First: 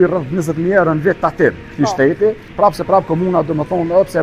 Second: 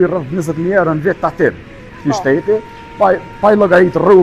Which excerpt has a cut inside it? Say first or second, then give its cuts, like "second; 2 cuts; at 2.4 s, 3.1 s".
first; 2 cuts; at 1.7 s, 2.5 s